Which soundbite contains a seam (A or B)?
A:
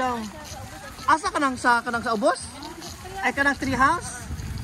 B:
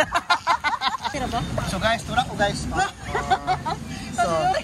B